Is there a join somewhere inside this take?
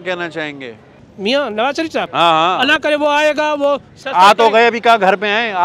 no; 0 cuts

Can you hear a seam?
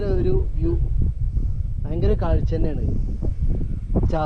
no; 0 cuts

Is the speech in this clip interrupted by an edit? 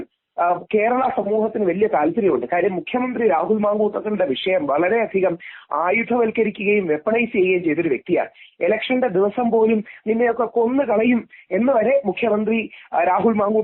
no; 0 cuts

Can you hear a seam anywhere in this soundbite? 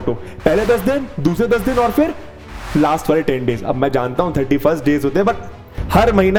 no; 0 cuts

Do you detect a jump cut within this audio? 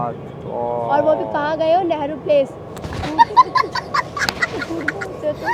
no; 0 cuts

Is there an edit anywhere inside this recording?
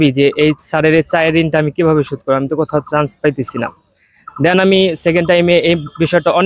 no; 0 cuts

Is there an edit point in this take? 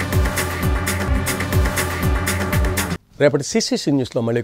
no; 0 cuts

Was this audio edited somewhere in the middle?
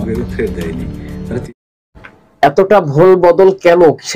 yes; 1 cut; at 1.3 s

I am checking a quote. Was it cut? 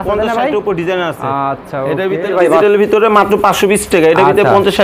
yes; 1 cut; at 2.3 s

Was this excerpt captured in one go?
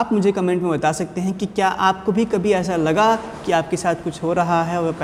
yes; 0 cuts

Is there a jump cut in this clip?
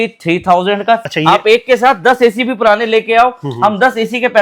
yes; 1 cut; at 1.0 s

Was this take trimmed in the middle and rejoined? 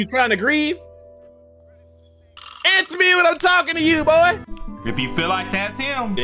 yes; 1 cut; at 4.4 s

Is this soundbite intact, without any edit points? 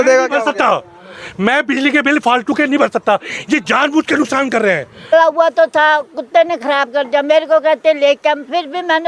no; 1 cut; at 5.1 s

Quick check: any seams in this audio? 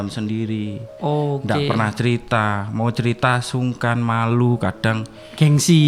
no; 0 cuts

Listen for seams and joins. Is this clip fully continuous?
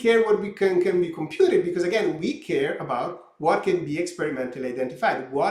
yes; 0 cuts

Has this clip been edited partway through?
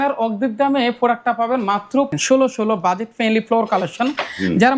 yes; 1 cut; at 2.1 s

